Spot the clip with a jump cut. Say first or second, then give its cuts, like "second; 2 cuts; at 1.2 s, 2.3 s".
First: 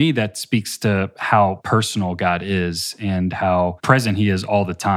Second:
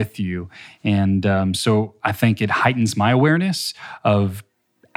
first; 2 cuts; at 1.6 s, 3.8 s